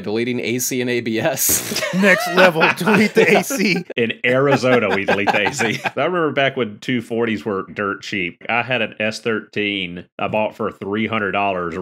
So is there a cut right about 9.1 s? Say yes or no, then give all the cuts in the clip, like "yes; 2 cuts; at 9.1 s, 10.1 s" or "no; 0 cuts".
no; 4 cuts; at 2.0 s, 3.8 s, 5.9 s, 7.7 s